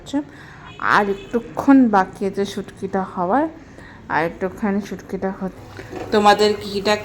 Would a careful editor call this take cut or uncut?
cut